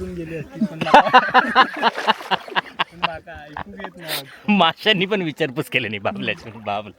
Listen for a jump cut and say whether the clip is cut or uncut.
uncut